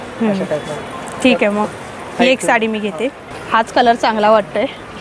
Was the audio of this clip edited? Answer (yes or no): yes